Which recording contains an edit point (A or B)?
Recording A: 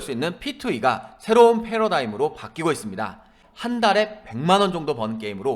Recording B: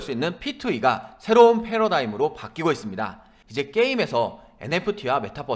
A